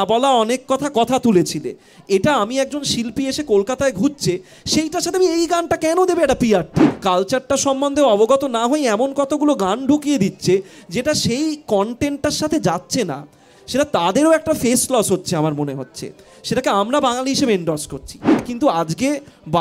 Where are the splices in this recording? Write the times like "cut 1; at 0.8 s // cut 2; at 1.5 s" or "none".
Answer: cut 1; at 6.9 s // cut 2; at 18.4 s